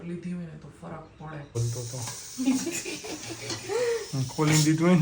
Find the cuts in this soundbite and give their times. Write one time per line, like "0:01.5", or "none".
0:01.6